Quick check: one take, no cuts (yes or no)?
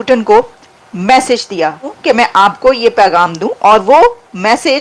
no